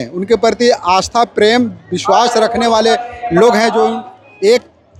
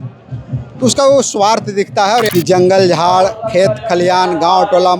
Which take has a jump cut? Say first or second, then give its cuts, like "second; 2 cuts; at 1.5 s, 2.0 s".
second; 1 cut; at 2.3 s